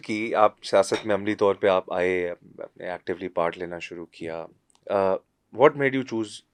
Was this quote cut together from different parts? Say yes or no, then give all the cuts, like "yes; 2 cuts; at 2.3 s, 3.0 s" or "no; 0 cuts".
no; 0 cuts